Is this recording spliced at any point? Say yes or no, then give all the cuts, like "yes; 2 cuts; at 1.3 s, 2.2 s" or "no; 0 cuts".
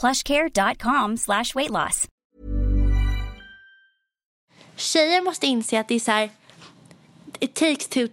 yes; 2 cuts; at 2.2 s, 4.3 s